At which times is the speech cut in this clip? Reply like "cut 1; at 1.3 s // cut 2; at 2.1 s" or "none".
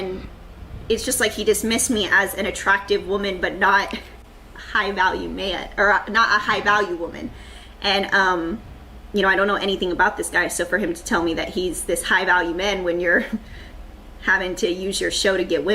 cut 1; at 6.4 s